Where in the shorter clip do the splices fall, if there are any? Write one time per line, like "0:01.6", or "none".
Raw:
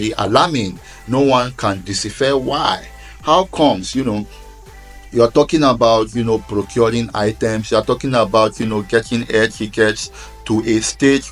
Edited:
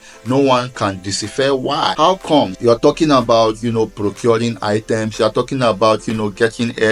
0:01.9
0:02.5